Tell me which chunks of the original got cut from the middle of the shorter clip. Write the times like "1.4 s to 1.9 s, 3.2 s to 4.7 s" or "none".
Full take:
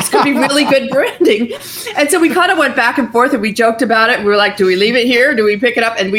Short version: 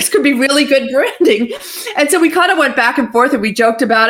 none